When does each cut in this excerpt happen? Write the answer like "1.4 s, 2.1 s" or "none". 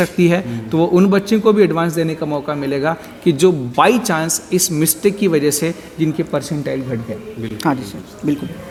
none